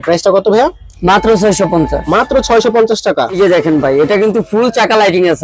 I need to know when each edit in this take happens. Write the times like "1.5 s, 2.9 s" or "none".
3.3 s